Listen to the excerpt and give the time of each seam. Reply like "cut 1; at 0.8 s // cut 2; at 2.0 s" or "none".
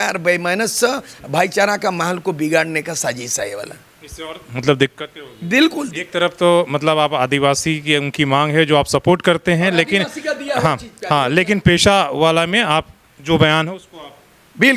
none